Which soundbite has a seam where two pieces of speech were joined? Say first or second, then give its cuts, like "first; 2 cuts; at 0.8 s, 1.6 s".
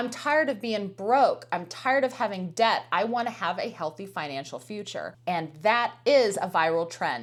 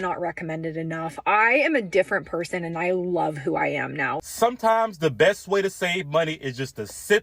second; 1 cut; at 4.2 s